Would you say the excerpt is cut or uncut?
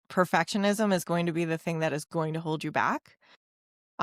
uncut